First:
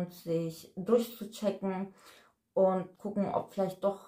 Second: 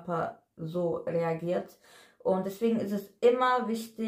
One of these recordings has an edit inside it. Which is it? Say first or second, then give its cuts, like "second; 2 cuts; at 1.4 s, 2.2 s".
first; 1 cut; at 3.0 s